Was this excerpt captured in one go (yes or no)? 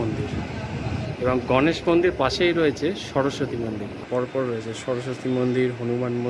no